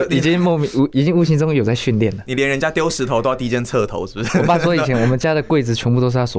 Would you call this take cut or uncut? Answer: uncut